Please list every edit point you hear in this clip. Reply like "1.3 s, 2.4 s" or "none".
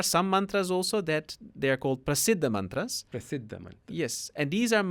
none